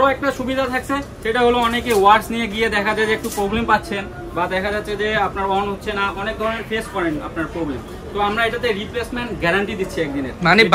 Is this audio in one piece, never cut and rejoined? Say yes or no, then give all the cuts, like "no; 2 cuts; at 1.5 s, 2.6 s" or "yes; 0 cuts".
yes; 0 cuts